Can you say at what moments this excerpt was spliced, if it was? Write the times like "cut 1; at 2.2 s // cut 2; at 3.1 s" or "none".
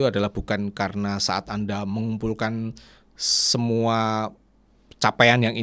none